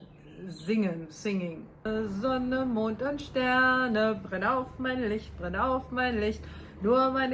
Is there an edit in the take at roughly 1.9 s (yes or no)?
yes